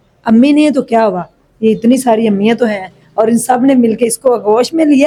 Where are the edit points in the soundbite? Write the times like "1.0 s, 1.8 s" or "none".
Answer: none